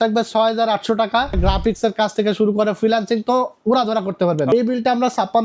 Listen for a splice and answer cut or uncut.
cut